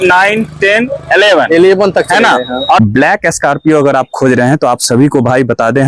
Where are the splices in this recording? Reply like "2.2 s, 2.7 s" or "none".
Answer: 2.8 s